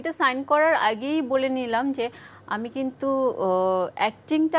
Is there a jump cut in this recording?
no; 0 cuts

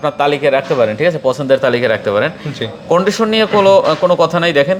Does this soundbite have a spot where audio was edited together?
no; 0 cuts

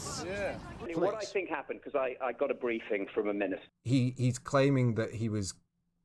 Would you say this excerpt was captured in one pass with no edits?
no; 2 cuts; at 0.9 s, 3.6 s

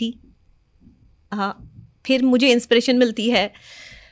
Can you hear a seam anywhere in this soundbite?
no; 0 cuts

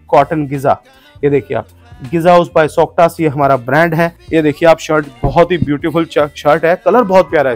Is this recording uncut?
no; 1 cut; at 4.2 s

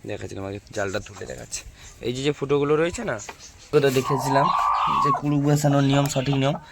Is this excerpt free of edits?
no; 1 cut; at 3.7 s

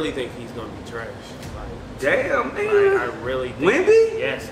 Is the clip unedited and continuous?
no; 1 cut; at 1.5 s

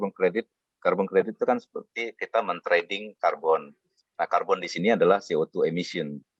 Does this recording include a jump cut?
no; 0 cuts

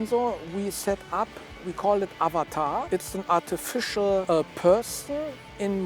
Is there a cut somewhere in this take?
yes; 3 cuts; at 1.6 s, 2.9 s, 4.2 s

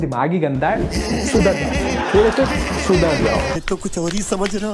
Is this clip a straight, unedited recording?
no; 1 cut; at 3.6 s

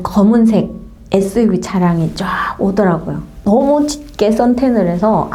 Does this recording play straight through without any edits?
yes; 0 cuts

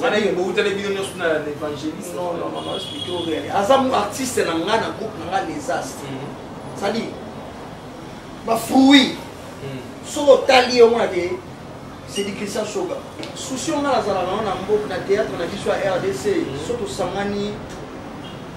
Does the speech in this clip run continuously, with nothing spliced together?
no; 1 cut; at 13.3 s

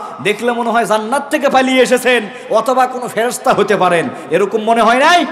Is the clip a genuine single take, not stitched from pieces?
yes; 0 cuts

